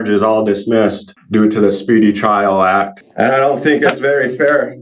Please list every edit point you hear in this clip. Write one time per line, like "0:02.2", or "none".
0:01.1
0:03.0

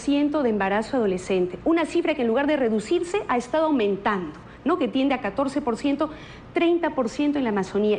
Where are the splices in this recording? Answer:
0:01.2

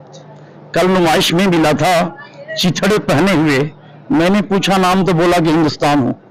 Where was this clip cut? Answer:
none

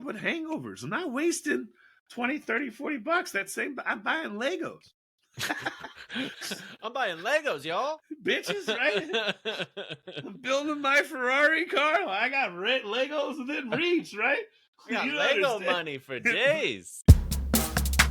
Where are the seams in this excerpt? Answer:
0:16.9

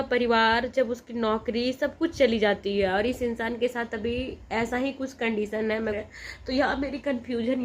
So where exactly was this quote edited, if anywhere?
0:06.0

